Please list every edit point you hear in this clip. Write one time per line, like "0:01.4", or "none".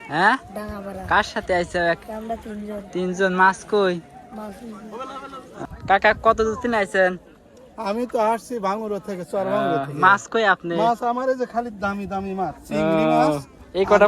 0:05.6